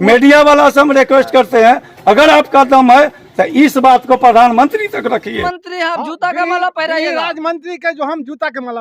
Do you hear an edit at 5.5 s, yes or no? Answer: yes